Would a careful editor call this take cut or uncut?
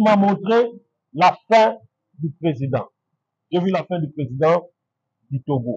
uncut